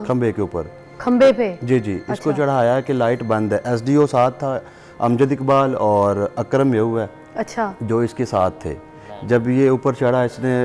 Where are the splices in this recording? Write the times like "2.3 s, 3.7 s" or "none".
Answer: none